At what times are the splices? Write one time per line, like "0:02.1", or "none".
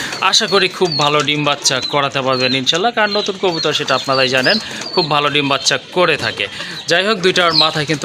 none